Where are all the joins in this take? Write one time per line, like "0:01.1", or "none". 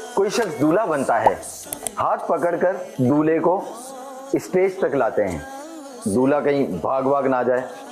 0:01.8

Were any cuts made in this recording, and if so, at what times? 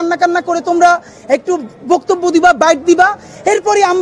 none

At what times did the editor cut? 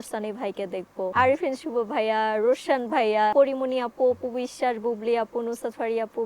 0:01.1
0:03.3

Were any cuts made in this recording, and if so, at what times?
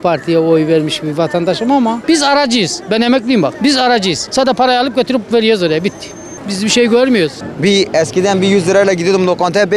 0:02.0
0:07.4

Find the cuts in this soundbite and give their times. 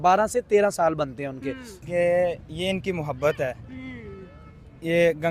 0:01.8

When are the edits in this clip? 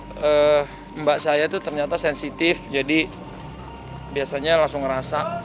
none

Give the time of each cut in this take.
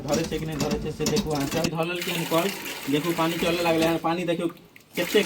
0:01.6

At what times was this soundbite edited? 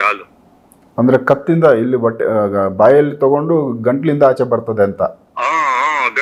none

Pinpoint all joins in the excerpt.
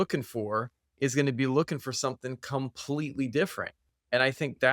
0:03.8

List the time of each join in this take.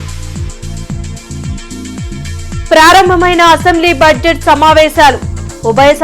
none

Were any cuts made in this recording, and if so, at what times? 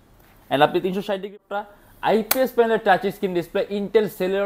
0:01.3

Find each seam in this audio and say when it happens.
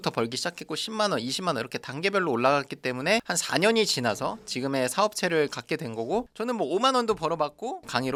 none

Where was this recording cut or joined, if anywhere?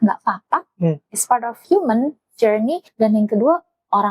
0:01.6
0:02.8

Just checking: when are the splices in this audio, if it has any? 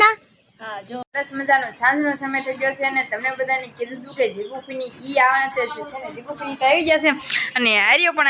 0:01.0

